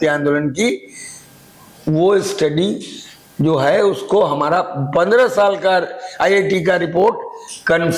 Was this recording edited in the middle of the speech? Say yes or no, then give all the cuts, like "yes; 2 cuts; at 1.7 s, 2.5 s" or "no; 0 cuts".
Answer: no; 0 cuts